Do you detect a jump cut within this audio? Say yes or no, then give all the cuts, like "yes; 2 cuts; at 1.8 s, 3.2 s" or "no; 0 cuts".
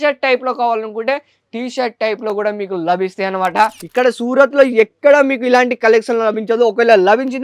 yes; 1 cut; at 3.8 s